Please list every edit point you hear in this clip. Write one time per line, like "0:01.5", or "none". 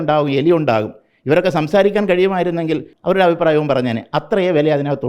0:02.9